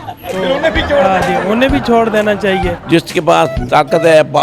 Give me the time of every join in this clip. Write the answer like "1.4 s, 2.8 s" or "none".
2.8 s